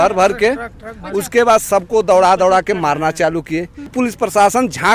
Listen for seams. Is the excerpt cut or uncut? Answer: cut